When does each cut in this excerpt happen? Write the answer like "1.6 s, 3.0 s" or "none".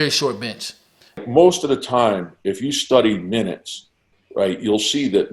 1.2 s